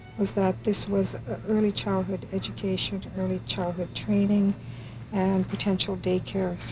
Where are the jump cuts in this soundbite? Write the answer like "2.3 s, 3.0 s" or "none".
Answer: none